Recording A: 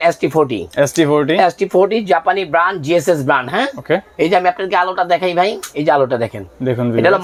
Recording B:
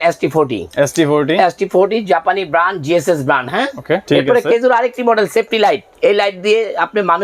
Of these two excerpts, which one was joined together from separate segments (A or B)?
B